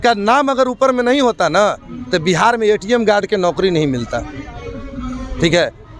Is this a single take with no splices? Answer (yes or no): yes